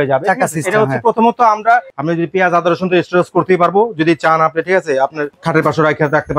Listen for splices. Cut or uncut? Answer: cut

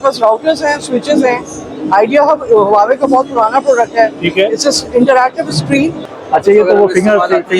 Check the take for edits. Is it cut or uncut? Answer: cut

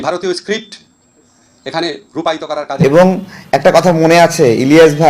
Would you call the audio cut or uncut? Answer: cut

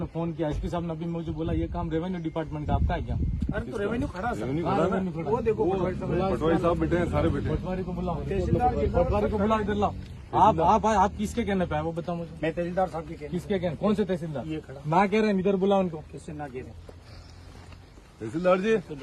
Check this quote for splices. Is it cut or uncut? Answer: uncut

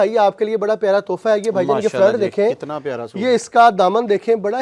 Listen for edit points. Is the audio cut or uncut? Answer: uncut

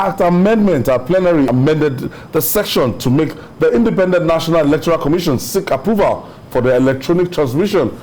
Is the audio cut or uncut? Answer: cut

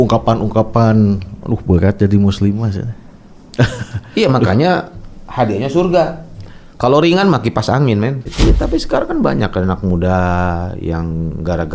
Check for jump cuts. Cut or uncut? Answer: cut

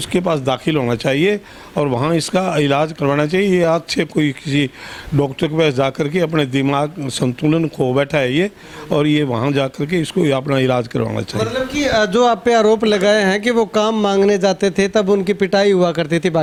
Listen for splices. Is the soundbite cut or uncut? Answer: uncut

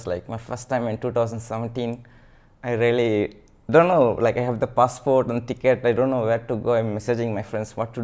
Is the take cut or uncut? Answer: uncut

